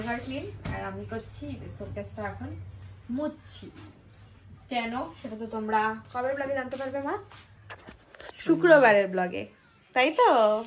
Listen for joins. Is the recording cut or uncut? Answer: uncut